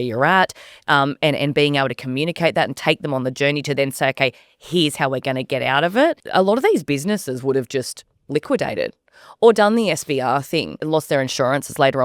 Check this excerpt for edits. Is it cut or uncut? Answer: cut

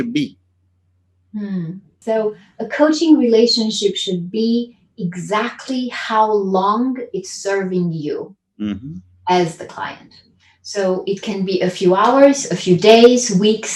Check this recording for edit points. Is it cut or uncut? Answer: cut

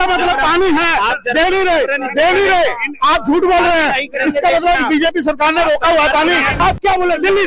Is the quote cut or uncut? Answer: cut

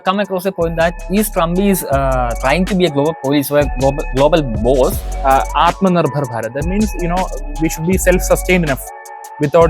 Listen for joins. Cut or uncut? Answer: cut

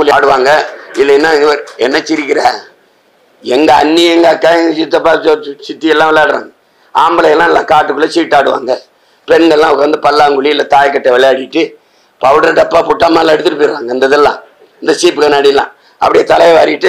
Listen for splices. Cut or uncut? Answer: uncut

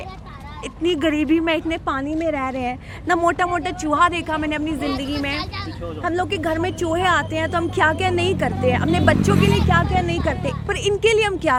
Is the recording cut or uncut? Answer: uncut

